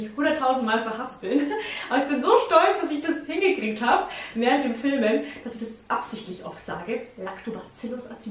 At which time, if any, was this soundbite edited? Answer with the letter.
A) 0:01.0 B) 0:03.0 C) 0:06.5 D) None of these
D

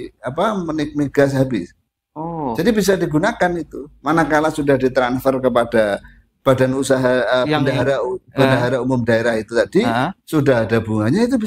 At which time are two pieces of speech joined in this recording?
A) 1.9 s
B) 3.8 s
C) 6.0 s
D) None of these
D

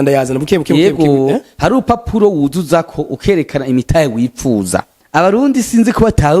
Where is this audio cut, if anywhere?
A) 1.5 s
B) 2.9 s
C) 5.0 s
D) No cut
C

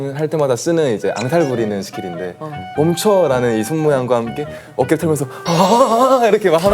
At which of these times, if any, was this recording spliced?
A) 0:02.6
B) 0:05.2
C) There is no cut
A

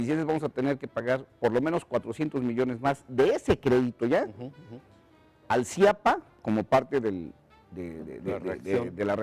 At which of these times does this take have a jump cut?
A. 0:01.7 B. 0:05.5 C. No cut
A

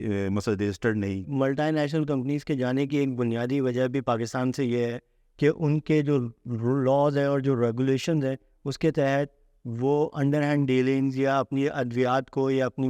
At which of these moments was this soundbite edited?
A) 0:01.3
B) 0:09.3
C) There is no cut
A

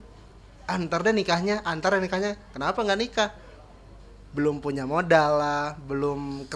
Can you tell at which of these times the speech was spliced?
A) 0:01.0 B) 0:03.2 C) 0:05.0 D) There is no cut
D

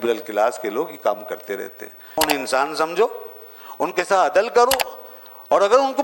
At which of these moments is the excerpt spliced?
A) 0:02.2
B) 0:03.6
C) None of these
A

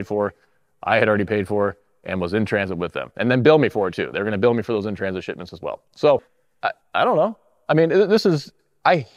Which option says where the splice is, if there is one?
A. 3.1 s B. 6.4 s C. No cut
B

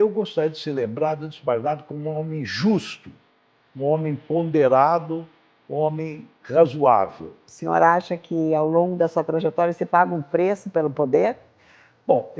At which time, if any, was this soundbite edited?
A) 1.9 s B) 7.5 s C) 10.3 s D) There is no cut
B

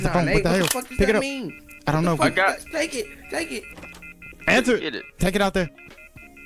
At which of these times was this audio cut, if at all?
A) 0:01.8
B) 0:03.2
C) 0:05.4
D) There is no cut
D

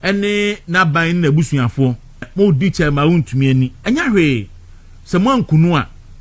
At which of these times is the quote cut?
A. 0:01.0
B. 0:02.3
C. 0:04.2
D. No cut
B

